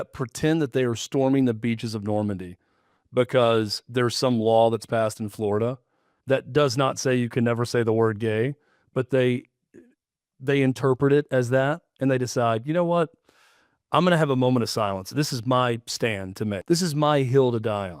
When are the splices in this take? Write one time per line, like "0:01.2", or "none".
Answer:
0:16.6